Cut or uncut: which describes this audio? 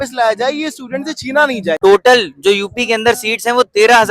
cut